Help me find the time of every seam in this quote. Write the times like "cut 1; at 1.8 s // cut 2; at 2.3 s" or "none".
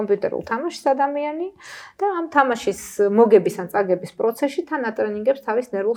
none